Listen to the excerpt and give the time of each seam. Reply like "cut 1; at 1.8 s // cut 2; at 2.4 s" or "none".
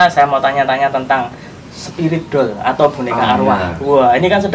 none